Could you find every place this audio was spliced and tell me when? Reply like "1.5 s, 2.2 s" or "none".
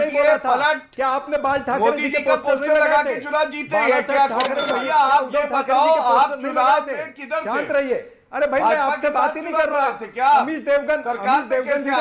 4.7 s